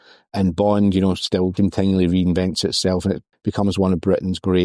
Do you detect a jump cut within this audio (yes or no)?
yes